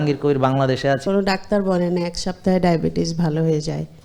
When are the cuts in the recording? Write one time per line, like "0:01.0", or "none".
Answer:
0:01.0